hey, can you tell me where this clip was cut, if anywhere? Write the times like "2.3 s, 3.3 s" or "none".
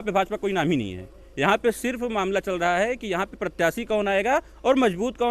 none